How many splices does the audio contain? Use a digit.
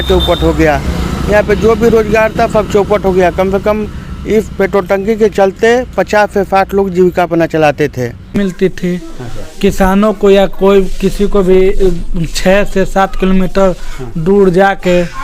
1